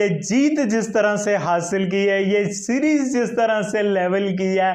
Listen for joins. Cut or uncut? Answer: uncut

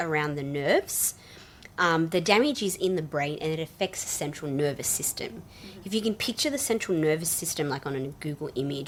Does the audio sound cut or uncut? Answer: uncut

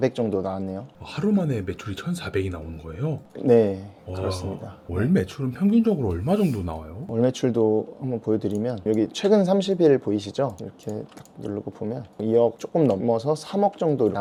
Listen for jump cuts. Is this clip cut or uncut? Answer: uncut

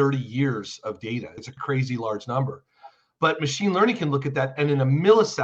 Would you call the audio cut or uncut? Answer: cut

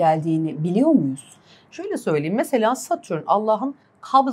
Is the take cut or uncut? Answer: uncut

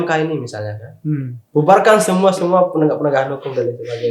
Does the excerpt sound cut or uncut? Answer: uncut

